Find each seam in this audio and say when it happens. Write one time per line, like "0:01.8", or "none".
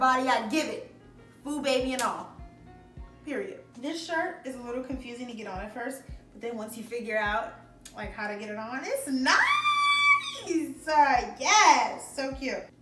none

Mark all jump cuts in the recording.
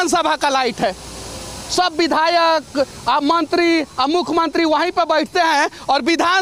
none

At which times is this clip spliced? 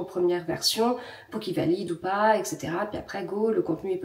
none

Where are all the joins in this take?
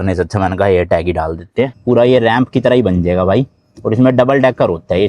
0:01.8

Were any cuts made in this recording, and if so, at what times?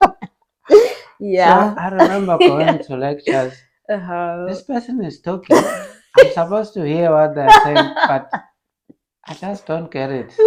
none

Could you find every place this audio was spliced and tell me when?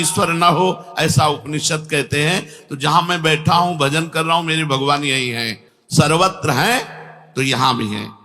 none

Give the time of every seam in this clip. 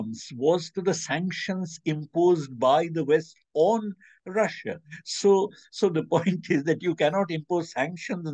none

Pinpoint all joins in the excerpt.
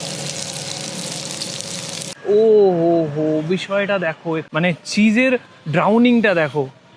0:02.2

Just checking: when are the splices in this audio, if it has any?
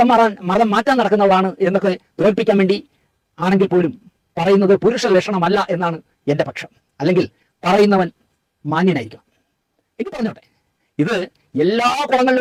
none

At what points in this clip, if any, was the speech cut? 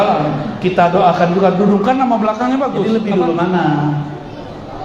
0:02.9

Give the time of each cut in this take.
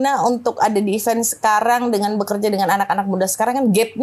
none

